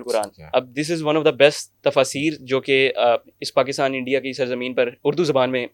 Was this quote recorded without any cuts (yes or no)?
yes